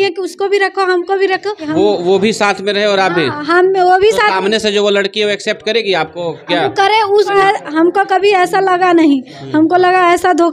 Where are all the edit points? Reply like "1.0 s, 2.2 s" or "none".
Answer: 1.7 s, 7.4 s

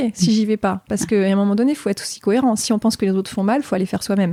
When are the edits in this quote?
none

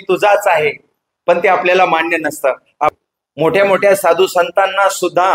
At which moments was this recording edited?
2.9 s

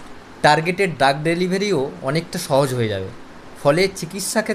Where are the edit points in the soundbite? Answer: none

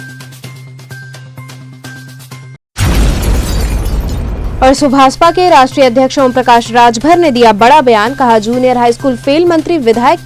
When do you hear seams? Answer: 2.6 s, 4.4 s

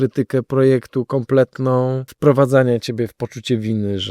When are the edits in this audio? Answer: 2.1 s

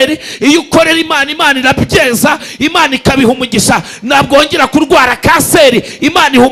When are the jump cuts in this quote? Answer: none

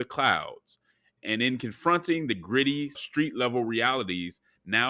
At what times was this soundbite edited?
1.2 s, 3.0 s

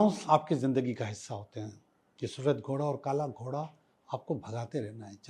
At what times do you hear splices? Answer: none

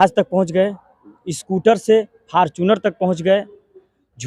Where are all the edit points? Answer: none

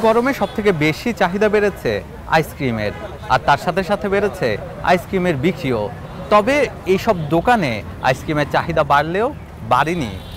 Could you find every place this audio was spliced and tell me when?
none

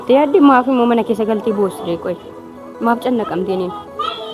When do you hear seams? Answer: none

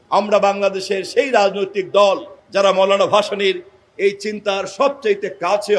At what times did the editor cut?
none

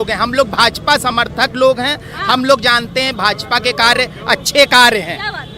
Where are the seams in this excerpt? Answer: none

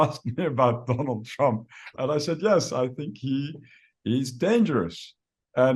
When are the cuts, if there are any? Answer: none

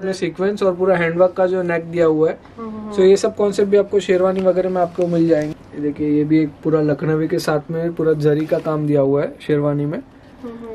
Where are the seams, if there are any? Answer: 5.6 s

